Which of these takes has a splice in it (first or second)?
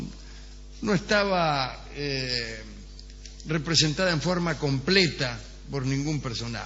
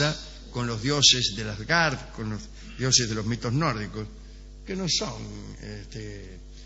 first